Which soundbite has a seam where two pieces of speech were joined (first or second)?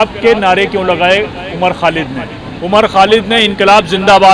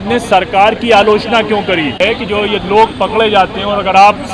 second